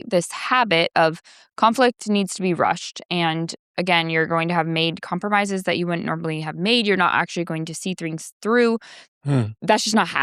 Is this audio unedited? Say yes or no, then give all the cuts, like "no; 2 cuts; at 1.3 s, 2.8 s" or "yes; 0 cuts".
no; 1 cut; at 9.0 s